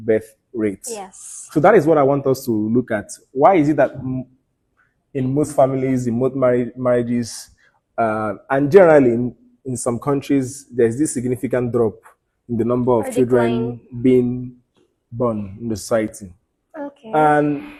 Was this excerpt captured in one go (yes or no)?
yes